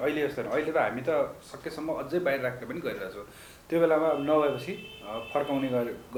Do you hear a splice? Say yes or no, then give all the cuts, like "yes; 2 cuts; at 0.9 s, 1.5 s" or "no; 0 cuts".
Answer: no; 0 cuts